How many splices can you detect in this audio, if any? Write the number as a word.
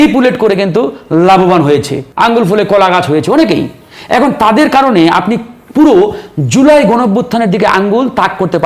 one